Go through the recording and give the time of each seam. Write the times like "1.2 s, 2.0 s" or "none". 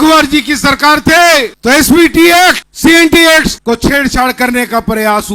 1.5 s, 2.7 s, 3.6 s